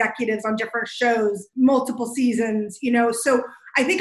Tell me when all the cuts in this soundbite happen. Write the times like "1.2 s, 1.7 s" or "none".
1.5 s